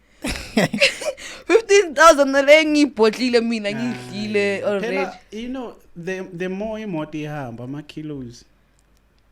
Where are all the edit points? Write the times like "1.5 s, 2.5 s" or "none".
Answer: none